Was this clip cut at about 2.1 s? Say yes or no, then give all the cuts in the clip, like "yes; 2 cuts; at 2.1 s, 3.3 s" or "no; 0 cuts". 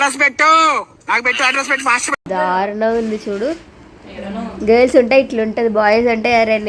yes; 1 cut; at 2.1 s